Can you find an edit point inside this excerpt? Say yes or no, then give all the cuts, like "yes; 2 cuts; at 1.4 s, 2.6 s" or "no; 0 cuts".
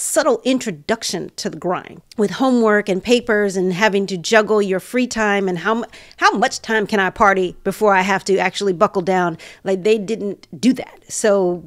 yes; 1 cut; at 1.9 s